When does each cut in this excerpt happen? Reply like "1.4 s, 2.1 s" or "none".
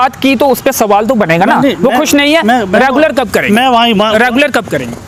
none